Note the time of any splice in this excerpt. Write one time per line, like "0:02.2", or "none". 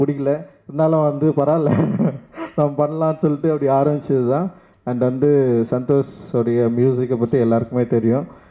none